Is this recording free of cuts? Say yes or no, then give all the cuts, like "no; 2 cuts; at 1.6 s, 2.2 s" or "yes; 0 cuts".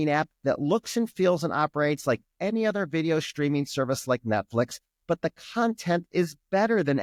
yes; 0 cuts